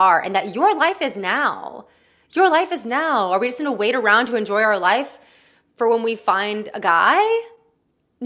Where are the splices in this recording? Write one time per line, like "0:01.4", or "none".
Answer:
none

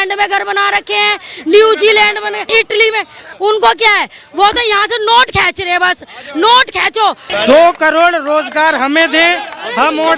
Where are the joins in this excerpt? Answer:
0:02.4
0:03.2
0:07.2

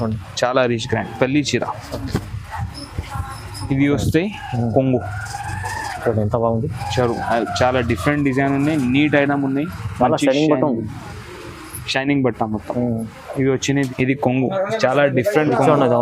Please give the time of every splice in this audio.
0:13.9

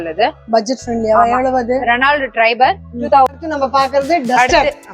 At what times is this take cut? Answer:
0:03.3

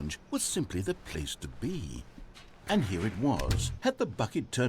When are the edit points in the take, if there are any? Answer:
0:02.5

